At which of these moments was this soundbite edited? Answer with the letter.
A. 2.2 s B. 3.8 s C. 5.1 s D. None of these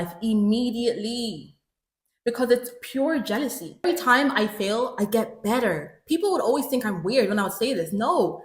B